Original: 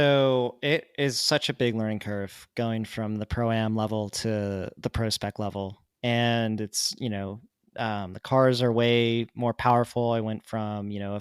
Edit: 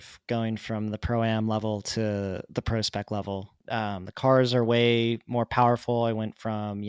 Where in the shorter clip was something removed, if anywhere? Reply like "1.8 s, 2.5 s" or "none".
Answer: 3.5 s